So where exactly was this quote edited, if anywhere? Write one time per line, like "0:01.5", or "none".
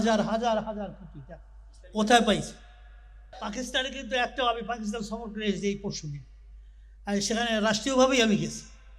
0:03.2